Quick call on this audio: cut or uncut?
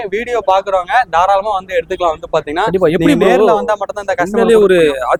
uncut